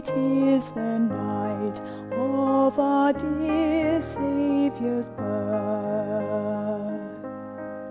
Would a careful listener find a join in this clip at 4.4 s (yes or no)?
no